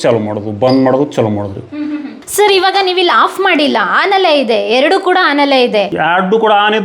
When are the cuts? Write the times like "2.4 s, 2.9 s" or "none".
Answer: 2.2 s